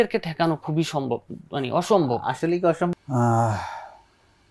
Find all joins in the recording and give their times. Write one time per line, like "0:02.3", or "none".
0:02.9